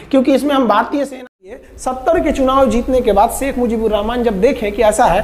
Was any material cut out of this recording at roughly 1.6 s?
yes; 1 cut; at 1.6 s

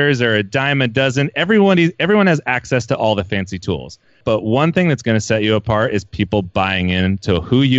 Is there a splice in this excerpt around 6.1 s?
no; 1 cut; at 4.2 s

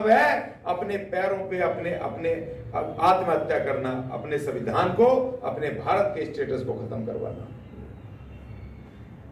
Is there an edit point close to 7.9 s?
no; 0 cuts

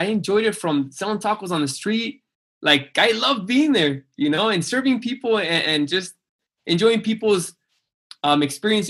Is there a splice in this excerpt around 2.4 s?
no; 1 cut; at 6.4 s

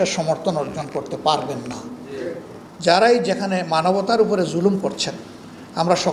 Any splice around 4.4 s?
no; 1 cut; at 2.6 s

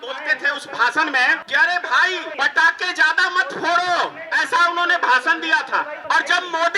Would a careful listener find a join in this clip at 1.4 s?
yes; 4 cuts; at 1.4 s, 2.3 s, 4.2 s, 6.0 s

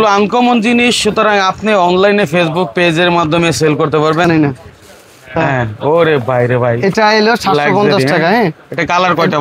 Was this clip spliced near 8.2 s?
no; 1 cut; at 4.2 s

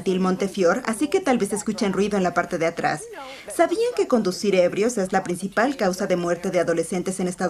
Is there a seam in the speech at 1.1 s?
no; 1 cut; at 2.7 s

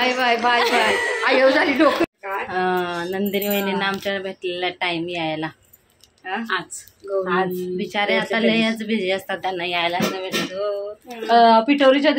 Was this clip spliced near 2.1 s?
yes; 1 cut; at 2.1 s

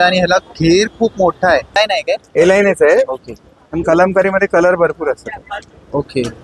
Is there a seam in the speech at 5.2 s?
no; 1 cut; at 1.8 s

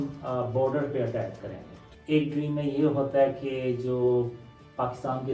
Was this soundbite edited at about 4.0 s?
no; 1 cut; at 1.9 s

